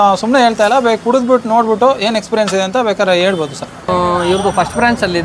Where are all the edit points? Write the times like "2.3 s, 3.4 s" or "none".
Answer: 3.9 s